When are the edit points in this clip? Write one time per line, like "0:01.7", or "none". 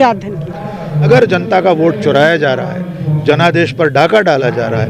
0:01.1

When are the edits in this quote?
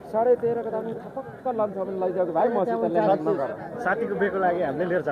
0:03.7

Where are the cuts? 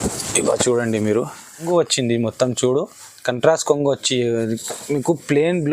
0:01.7

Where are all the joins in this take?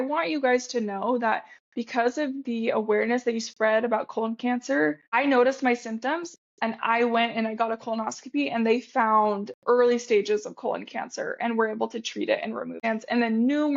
0:05.1
0:12.8

